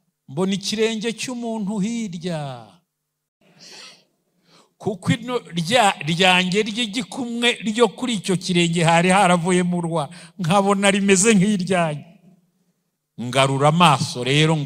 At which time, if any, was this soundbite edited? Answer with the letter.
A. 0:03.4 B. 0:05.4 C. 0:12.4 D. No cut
A